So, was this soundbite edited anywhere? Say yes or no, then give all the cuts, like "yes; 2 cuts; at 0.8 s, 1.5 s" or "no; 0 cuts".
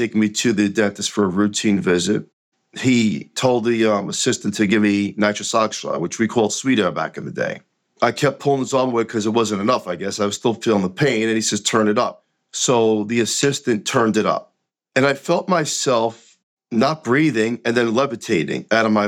yes; 2 cuts; at 2.5 s, 7.8 s